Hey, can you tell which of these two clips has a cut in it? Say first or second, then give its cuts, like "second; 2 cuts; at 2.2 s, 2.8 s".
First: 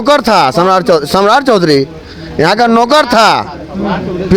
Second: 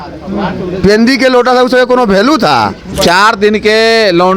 second; 1 cut; at 2.9 s